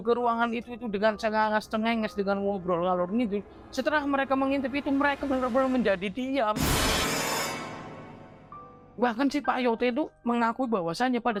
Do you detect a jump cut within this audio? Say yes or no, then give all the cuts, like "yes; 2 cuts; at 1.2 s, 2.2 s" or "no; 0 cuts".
no; 0 cuts